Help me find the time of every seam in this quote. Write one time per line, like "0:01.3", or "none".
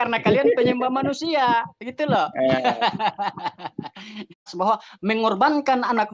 0:04.5